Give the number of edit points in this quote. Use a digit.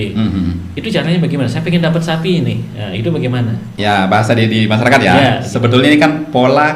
0